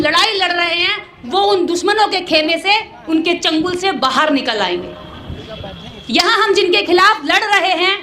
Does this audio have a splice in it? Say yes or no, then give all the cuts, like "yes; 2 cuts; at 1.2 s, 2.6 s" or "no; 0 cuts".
no; 0 cuts